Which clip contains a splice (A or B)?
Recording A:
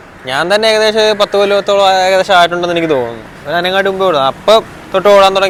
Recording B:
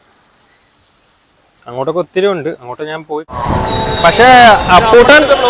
B